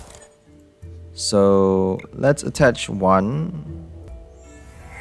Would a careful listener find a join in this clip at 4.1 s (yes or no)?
yes